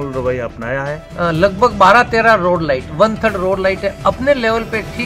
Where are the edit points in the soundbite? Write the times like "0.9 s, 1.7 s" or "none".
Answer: 1.0 s